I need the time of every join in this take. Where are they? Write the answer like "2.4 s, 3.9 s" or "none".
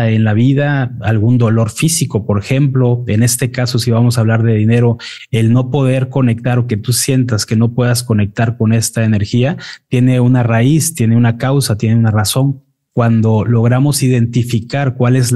none